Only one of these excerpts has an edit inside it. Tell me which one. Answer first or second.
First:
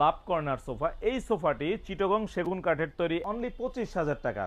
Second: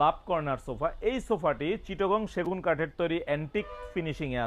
first